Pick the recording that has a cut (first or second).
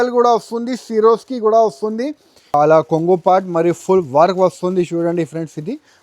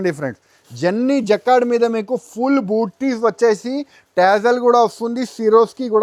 first